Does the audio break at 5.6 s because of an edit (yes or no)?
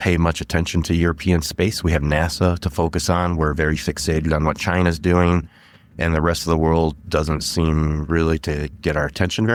no